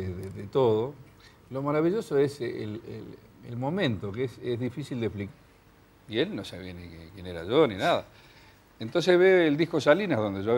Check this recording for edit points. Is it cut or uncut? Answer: uncut